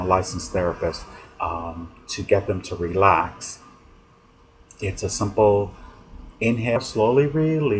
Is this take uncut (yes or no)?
yes